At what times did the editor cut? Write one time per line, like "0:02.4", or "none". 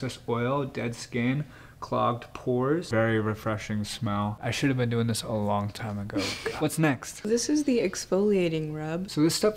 0:06.3